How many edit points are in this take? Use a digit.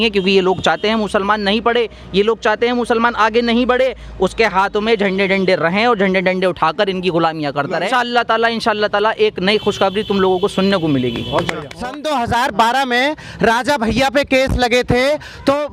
2